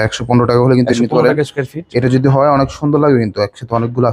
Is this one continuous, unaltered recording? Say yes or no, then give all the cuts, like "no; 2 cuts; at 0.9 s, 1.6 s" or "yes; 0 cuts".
yes; 0 cuts